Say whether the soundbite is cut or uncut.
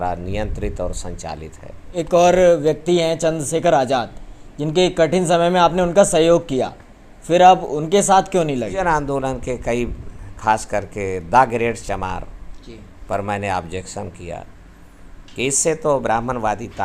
cut